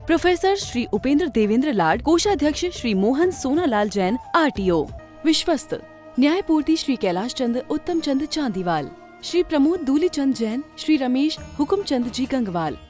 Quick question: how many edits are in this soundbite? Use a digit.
1